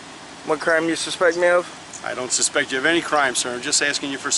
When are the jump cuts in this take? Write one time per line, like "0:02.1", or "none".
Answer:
none